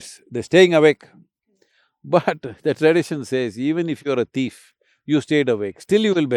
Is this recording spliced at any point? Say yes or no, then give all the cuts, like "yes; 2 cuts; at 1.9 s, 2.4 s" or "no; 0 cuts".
no; 0 cuts